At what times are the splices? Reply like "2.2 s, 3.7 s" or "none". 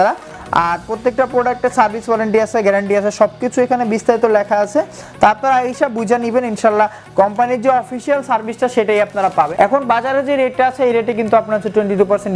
9.5 s